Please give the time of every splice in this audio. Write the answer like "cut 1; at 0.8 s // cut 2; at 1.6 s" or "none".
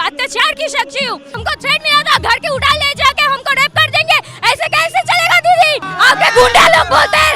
cut 1; at 1.3 s // cut 2; at 5.9 s